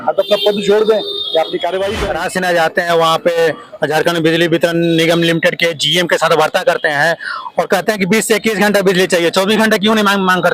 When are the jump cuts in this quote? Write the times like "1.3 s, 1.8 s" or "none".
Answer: 2.0 s